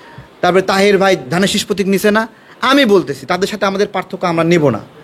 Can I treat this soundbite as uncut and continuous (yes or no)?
yes